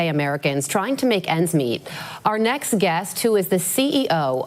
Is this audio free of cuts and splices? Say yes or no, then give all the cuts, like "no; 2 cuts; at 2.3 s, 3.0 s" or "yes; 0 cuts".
yes; 0 cuts